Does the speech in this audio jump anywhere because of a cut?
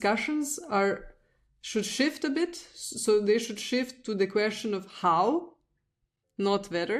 no; 0 cuts

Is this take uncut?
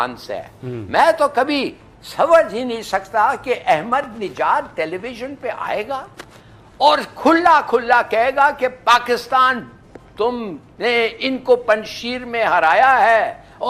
yes; 0 cuts

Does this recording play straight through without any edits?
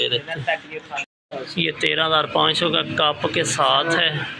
no; 1 cut; at 1.2 s

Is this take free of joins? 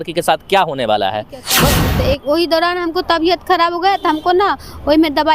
no; 1 cut; at 1.8 s

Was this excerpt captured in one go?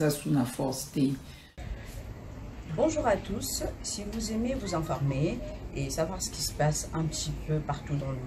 no; 1 cut; at 1.6 s

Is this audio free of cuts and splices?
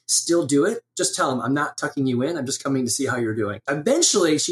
no; 2 cuts; at 0.9 s, 3.6 s

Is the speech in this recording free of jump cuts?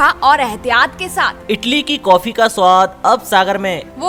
yes; 0 cuts

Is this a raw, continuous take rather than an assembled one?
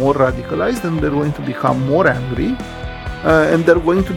yes; 0 cuts

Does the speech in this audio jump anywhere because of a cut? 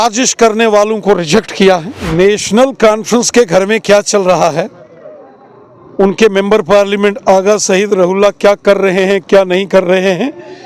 yes; 1 cut; at 2.0 s

